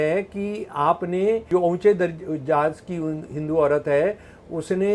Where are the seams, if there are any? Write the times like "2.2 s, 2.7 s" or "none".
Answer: 1.5 s